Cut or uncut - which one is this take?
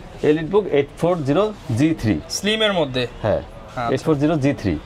uncut